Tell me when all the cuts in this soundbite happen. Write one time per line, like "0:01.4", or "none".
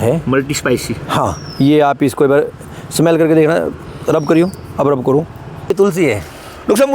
0:05.7